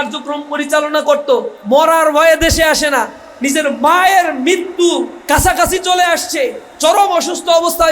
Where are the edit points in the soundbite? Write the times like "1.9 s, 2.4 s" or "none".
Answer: 1.6 s, 5.1 s, 6.6 s